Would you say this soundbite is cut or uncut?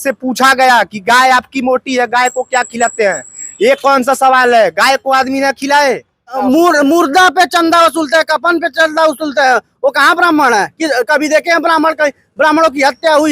cut